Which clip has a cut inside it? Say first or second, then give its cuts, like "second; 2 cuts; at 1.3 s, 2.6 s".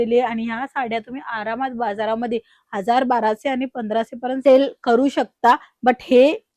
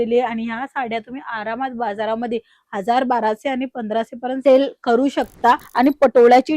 second; 1 cut; at 5.7 s